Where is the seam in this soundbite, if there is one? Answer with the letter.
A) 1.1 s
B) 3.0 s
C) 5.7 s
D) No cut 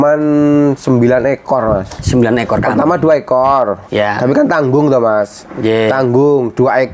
D